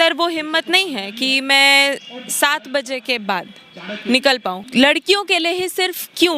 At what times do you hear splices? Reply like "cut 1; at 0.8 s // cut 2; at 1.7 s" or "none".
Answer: cut 1; at 4.6 s